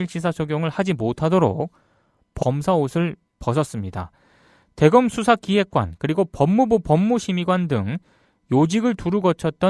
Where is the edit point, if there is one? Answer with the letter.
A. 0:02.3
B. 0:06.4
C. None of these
C